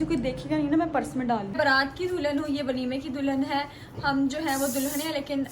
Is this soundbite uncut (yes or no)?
no